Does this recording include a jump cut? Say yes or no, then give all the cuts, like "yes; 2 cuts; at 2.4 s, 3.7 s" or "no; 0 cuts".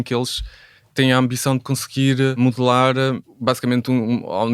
yes; 2 cuts; at 2.3 s, 3.3 s